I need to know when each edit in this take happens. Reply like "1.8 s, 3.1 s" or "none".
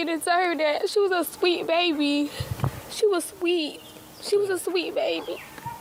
none